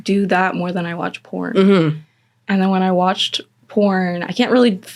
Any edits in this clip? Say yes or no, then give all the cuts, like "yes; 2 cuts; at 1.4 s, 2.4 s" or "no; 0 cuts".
no; 0 cuts